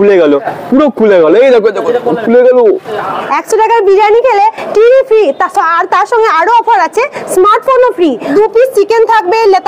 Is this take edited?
yes; 2 cuts; at 3.0 s, 8.3 s

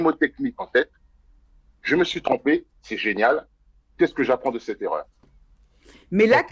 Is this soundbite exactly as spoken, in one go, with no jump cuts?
yes; 0 cuts

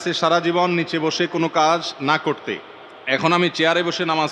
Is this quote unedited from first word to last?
yes; 0 cuts

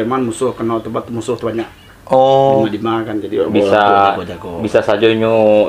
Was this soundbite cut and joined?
no; 0 cuts

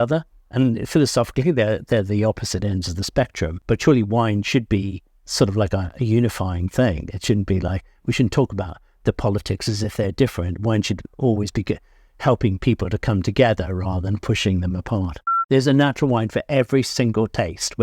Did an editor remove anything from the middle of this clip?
yes; 2 cuts; at 3.6 s, 15.3 s

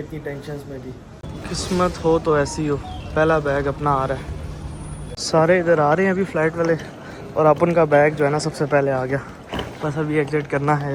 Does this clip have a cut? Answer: no; 0 cuts

